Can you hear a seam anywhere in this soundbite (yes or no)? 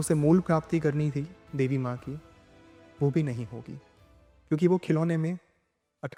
no